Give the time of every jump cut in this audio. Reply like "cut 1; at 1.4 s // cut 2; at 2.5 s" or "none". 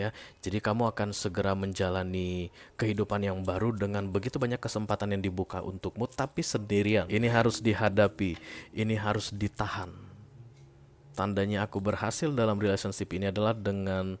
cut 1; at 7.1 s

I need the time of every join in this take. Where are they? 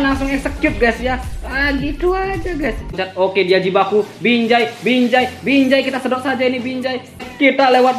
cut 1; at 3.0 s // cut 2; at 7.2 s

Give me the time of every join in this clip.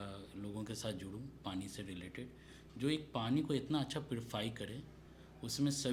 none

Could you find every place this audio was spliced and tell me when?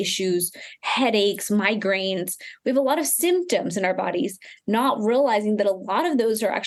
none

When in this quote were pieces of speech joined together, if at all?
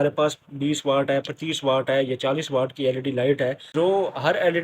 cut 1; at 3.7 s

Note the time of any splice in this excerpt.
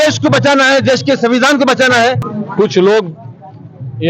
cut 1; at 2.3 s

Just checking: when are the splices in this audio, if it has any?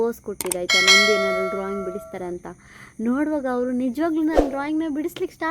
none

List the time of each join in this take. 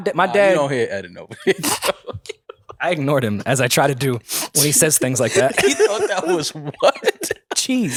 none

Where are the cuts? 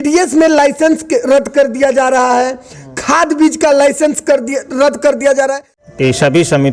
cut 1; at 5.7 s

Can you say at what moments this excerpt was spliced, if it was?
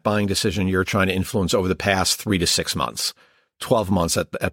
none

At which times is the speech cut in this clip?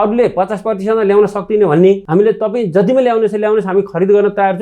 cut 1; at 2.0 s

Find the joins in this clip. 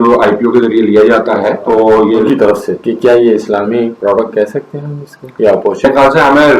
cut 1; at 2.3 s // cut 2; at 5.8 s

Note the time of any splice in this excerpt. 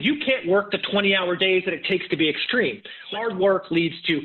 cut 1; at 3.1 s

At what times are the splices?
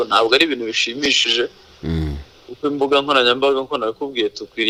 none

